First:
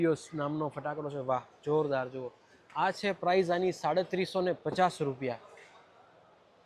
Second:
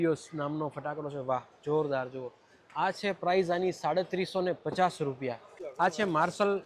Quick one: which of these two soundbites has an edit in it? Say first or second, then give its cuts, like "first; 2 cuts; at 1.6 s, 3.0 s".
second; 1 cut; at 5.6 s